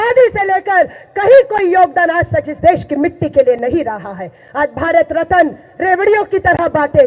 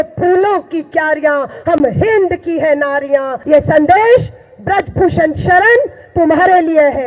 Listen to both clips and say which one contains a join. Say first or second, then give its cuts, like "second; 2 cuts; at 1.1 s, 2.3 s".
second; 1 cut; at 3.3 s